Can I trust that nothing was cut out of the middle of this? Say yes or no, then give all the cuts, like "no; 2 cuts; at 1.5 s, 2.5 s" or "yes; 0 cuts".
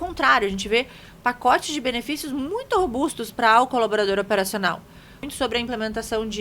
no; 1 cut; at 5.2 s